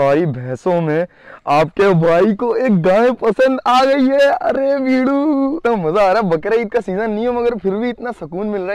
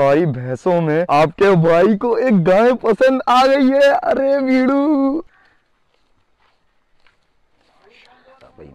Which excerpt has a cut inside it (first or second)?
second